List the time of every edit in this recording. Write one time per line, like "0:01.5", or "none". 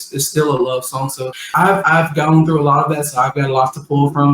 0:01.8